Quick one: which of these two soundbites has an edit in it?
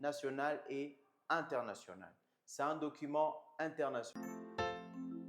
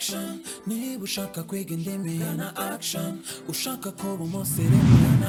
first; 1 cut; at 4.1 s

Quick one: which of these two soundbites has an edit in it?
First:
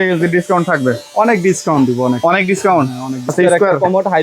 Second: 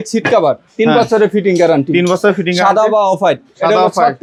first; 1 cut; at 3.3 s

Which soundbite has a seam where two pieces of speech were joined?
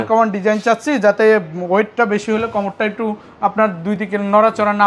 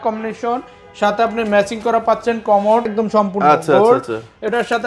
second; 1 cut; at 2.9 s

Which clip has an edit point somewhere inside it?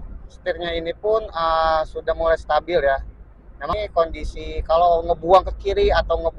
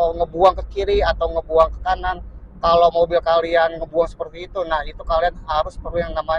first; 1 cut; at 3.8 s

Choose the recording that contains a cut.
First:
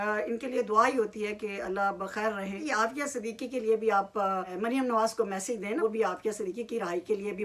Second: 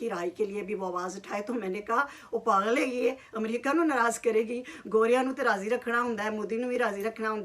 first; 3 cuts; at 2.6 s, 4.5 s, 5.8 s

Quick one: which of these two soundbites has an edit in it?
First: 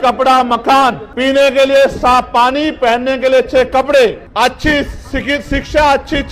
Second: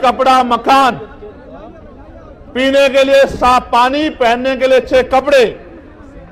first; 2 cuts; at 1.0 s, 4.2 s

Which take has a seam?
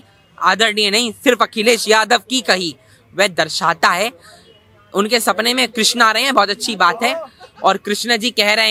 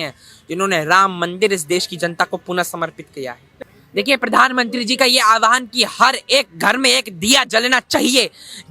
second; 1 cut; at 3.5 s

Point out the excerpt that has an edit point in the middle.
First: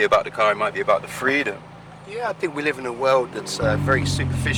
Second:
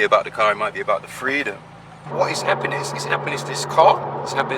second; 1 cut; at 2.0 s

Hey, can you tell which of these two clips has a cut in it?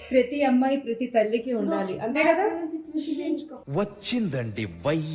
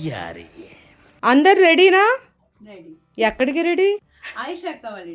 second; 2 cuts; at 1.1 s, 4.2 s

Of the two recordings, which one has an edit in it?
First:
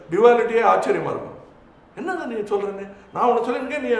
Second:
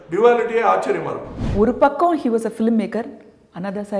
second; 1 cut; at 1.4 s

